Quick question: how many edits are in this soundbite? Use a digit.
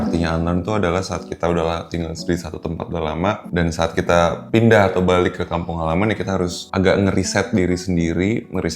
3